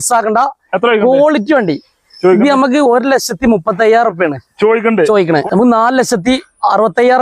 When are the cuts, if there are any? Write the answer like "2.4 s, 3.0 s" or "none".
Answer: 5.4 s